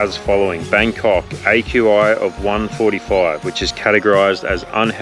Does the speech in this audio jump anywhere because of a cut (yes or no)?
no